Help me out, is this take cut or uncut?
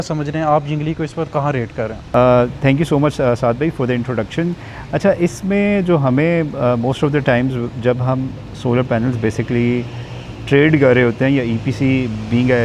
uncut